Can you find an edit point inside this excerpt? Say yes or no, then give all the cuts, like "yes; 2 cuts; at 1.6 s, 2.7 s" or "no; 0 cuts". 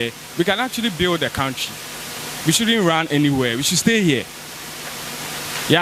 no; 0 cuts